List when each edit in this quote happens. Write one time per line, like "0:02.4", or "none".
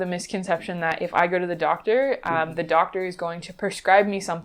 none

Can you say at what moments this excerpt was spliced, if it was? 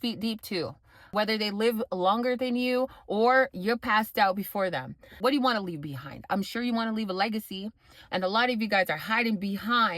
0:05.2

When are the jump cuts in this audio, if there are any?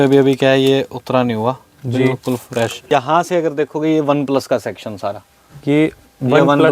0:02.8

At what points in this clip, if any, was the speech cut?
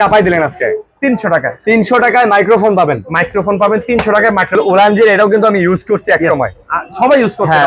0:04.5

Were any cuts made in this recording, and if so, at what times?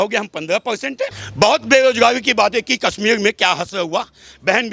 0:01.2

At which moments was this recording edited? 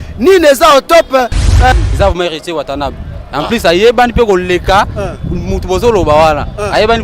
0:01.7

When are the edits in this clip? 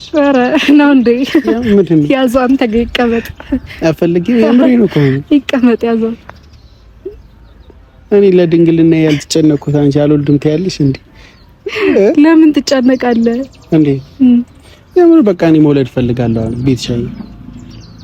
none

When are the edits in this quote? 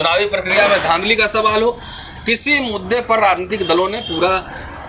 none

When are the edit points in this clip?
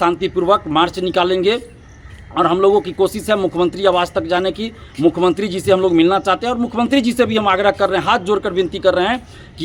none

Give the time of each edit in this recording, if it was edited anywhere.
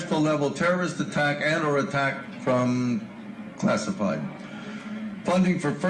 0:01.1

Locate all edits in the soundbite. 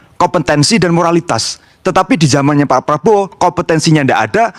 none

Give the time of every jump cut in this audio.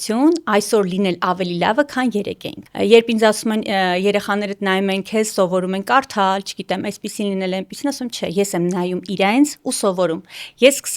none

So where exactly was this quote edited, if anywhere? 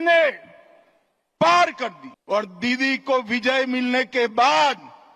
0:02.1

